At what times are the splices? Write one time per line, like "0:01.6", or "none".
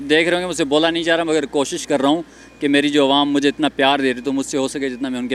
none

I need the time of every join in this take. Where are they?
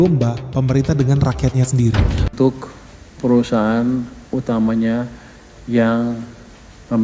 0:02.2

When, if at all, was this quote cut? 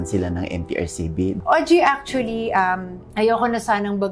0:01.4

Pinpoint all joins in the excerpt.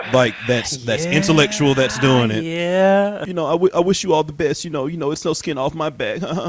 0:03.2

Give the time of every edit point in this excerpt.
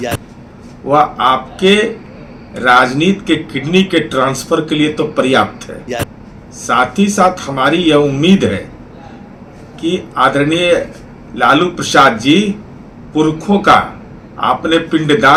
none

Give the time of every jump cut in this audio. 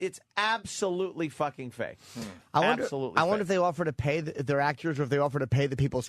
0:03.6

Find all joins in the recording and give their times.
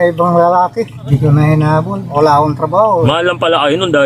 0:01.0
0:03.1

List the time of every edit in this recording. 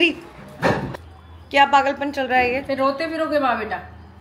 0:00.9

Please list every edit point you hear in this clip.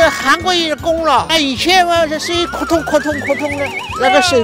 0:01.3

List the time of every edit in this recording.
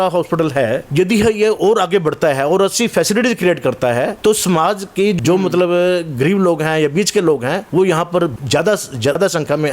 0:00.8
0:04.1
0:05.2
0:07.6
0:08.7

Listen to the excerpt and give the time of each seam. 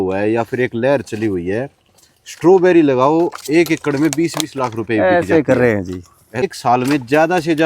0:06.4

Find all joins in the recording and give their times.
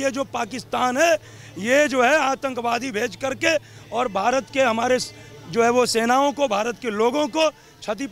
none

